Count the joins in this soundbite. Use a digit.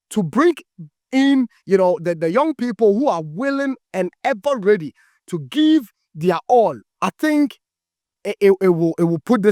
1